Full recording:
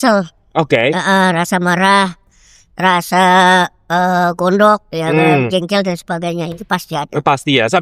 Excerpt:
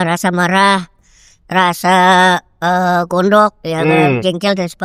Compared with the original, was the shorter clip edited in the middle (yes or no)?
no